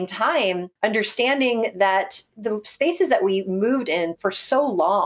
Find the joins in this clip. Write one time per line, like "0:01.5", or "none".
0:04.1